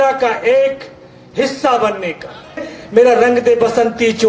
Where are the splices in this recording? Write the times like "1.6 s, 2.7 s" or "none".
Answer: 2.7 s